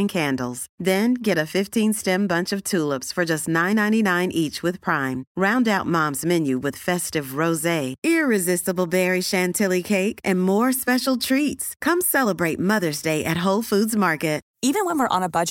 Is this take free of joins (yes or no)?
yes